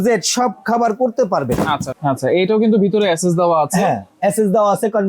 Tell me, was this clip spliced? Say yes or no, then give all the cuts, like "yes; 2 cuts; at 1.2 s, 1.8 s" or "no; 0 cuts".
yes; 1 cut; at 1.9 s